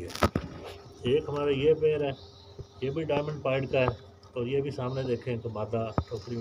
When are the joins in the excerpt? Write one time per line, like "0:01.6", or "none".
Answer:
none